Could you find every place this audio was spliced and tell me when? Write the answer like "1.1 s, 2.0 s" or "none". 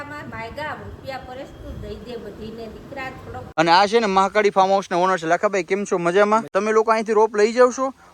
3.4 s, 6.5 s